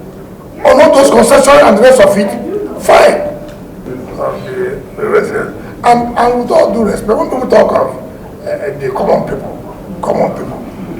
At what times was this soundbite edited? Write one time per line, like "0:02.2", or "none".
0:03.7